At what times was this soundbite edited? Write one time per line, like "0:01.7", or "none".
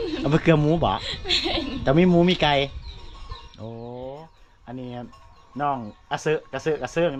none